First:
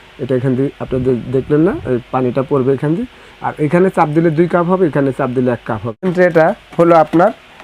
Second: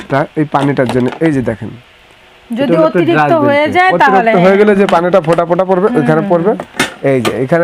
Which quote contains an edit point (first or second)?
first